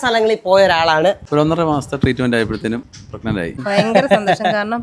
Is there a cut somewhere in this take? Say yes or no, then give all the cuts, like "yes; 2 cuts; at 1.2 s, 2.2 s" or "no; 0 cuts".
yes; 2 cuts; at 1.2 s, 3.5 s